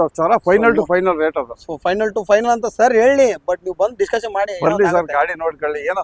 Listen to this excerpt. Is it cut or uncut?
uncut